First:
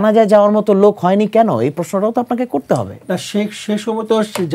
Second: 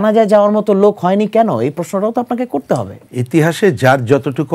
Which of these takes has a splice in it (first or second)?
second